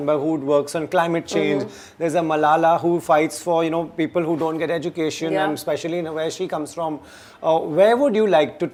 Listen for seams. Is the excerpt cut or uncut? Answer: uncut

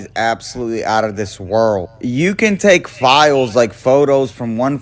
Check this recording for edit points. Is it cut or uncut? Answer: cut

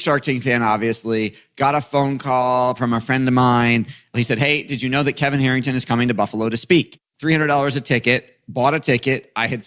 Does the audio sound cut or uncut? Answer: cut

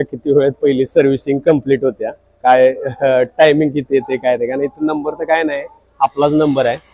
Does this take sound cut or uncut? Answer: uncut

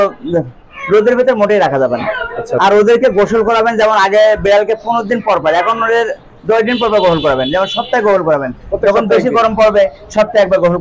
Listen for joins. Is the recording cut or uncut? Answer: uncut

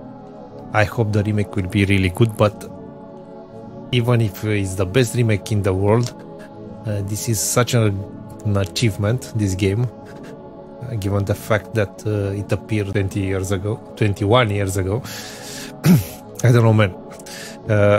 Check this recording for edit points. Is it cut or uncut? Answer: uncut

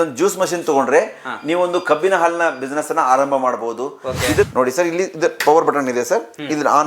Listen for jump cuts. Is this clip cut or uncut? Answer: cut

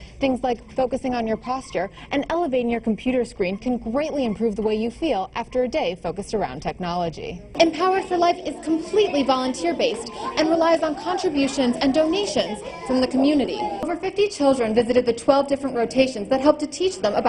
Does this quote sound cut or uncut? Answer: cut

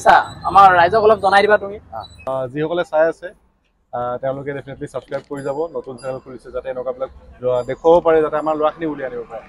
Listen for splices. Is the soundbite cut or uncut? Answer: cut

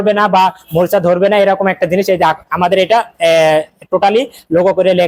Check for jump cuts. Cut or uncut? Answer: uncut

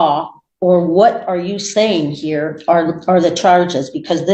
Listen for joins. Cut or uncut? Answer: uncut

